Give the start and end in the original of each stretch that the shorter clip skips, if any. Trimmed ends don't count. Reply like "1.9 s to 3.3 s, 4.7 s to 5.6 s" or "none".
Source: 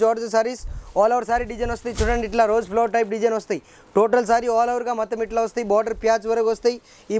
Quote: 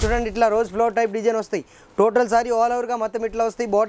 none